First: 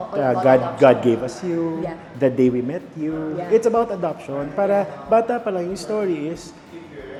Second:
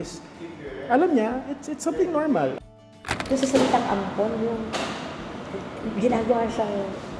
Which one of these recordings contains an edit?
second; 1 cut; at 2.6 s

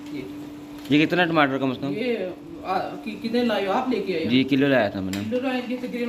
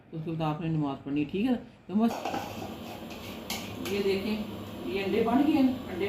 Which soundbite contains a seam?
second; 1 cut; at 2.1 s

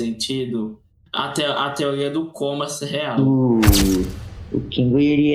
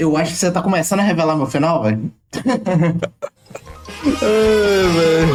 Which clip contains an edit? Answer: first; 1 cut; at 3.2 s

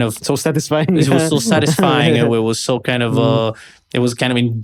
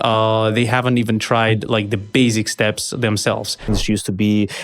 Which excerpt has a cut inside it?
second; 1 cut; at 3.7 s

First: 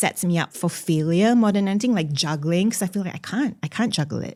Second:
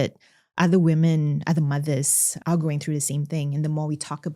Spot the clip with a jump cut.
second; 1 cut; at 2.4 s

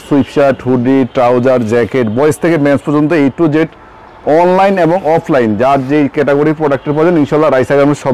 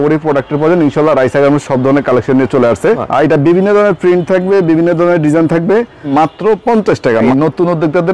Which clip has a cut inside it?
second; 3 cuts; at 3.0 s, 6.1 s, 7.3 s

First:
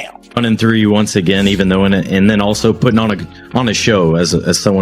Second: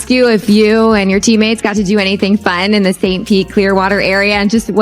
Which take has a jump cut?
second; 1 cut; at 3.9 s

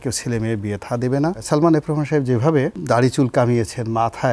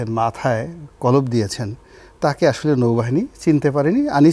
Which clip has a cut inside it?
first; 2 cuts; at 1.4 s, 2.8 s

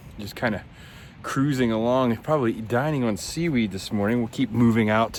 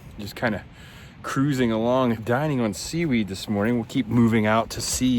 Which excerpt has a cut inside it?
second; 1 cut; at 2.2 s

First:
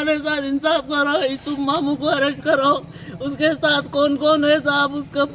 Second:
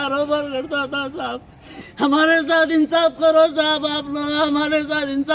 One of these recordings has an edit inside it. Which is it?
second; 1 cut; at 1.8 s

